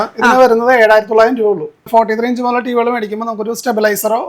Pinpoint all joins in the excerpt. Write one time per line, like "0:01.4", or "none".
0:01.9